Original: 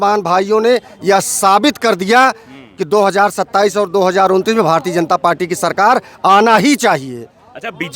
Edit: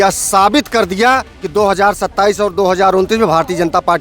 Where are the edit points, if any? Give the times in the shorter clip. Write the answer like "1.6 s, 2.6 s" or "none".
1.4 s